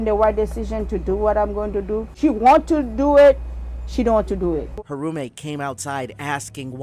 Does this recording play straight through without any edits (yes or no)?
no